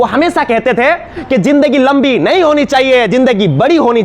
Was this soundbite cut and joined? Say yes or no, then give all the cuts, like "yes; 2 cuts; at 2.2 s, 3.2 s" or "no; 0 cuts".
no; 0 cuts